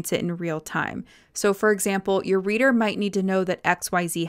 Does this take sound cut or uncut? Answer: uncut